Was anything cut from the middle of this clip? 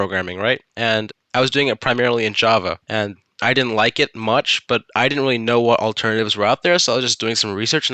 yes; 2 cuts; at 1.0 s, 2.8 s

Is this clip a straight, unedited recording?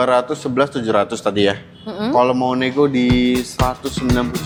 yes; 0 cuts

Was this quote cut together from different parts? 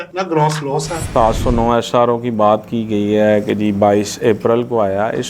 yes; 1 cut; at 1.1 s

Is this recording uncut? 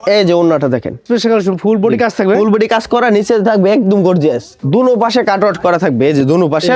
no; 2 cuts; at 1.0 s, 4.5 s

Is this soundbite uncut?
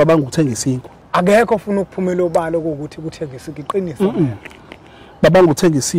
no; 1 cut; at 0.9 s

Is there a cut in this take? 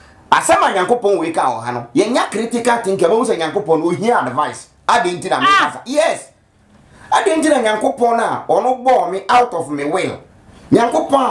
no; 0 cuts

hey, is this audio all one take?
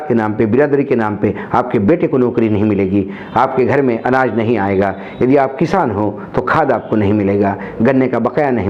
yes; 0 cuts

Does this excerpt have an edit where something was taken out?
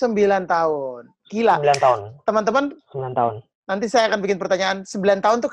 no; 0 cuts

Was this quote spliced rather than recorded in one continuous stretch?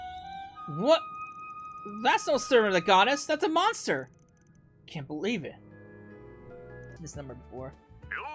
yes; 1 cut; at 6.9 s

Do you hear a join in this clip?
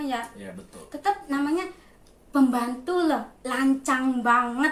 no; 0 cuts

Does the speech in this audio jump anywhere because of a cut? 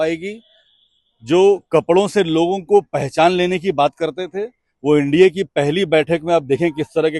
no; 0 cuts

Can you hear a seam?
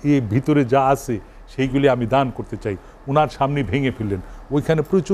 no; 0 cuts

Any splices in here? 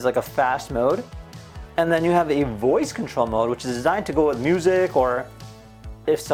no; 0 cuts

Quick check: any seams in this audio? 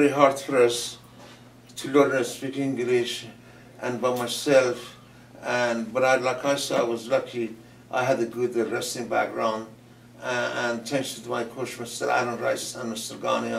yes; 1 cut; at 7.8 s

